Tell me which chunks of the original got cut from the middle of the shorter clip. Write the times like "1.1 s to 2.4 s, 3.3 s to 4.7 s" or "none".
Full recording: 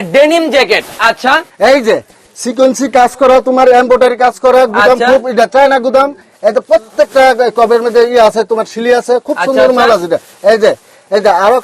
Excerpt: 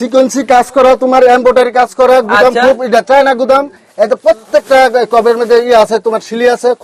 none